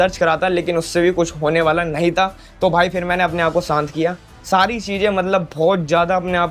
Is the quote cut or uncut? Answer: uncut